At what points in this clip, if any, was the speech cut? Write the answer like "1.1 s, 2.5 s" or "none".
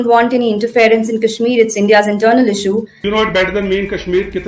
3.0 s